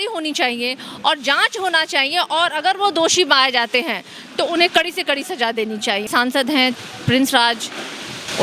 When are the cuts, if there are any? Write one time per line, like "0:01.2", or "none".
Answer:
0:06.1